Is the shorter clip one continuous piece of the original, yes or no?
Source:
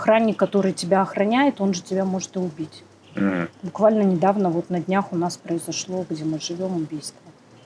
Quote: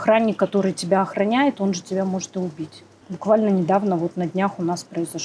no